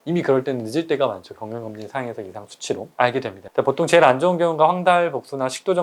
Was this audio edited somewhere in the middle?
no; 0 cuts

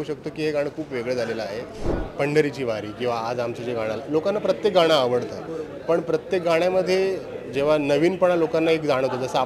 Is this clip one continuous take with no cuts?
no; 1 cut; at 1.9 s

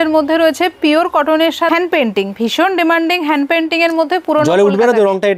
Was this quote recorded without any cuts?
no; 1 cut; at 1.7 s

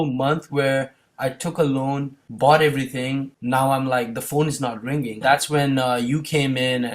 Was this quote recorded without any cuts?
no; 3 cuts; at 2.2 s, 3.3 s, 5.2 s

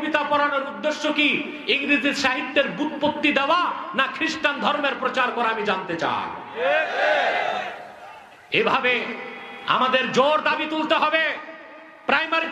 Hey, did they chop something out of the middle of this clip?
no; 0 cuts

